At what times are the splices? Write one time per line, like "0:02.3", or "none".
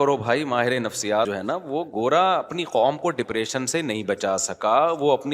0:01.3